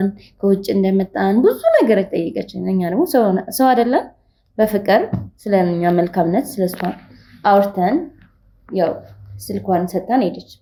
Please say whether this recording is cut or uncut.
uncut